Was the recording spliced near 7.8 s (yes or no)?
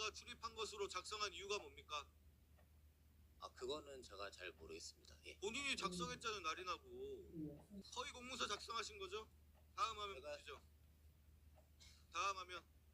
yes